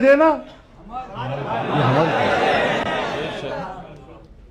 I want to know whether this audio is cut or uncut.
uncut